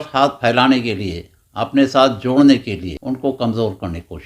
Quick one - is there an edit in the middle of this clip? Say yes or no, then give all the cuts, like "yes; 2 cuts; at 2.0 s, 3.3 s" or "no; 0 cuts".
yes; 1 cut; at 2.9 s